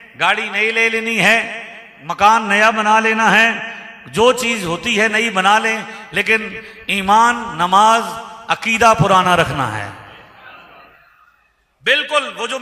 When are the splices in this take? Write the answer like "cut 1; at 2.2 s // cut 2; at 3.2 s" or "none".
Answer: none